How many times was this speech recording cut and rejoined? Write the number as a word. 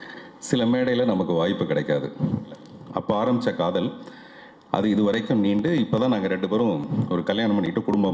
one